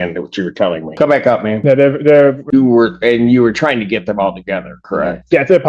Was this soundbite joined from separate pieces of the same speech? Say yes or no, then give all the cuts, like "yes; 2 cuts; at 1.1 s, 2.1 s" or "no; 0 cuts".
yes; 3 cuts; at 0.9 s, 1.6 s, 2.4 s